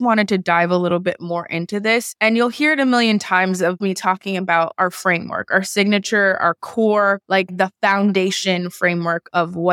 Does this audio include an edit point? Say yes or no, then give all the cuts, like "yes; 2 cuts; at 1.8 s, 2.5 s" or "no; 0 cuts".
no; 0 cuts